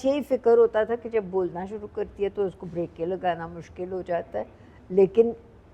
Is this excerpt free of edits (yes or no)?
yes